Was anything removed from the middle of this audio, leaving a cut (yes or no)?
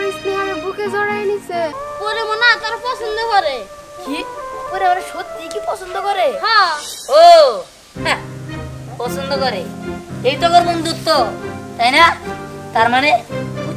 yes